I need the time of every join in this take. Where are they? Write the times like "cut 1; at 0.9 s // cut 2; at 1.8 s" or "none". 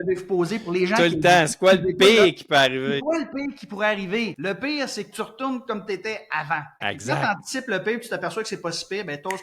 none